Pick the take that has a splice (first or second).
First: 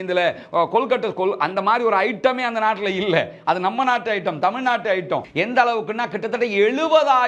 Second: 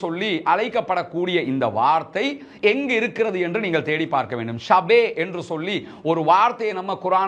first